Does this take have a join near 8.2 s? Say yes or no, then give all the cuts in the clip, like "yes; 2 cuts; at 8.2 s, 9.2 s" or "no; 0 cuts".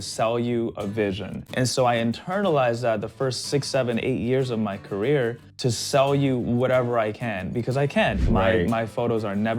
yes; 3 cuts; at 1.5 s, 5.5 s, 8.2 s